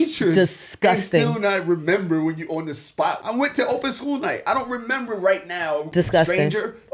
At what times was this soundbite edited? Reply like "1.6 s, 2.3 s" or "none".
3.2 s, 5.9 s